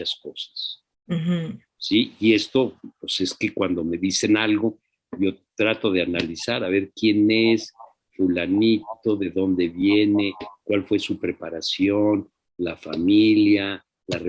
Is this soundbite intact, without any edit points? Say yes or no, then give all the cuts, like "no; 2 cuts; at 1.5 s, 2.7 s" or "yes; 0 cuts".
yes; 0 cuts